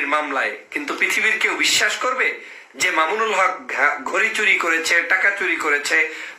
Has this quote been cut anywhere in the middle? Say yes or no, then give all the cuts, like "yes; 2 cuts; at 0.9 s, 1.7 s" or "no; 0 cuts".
no; 0 cuts